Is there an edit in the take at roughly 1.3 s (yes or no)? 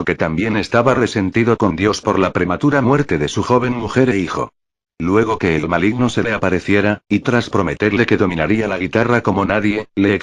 yes